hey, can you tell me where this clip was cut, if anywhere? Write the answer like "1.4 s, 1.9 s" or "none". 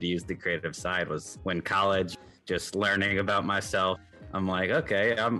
1.3 s, 2.1 s, 4.0 s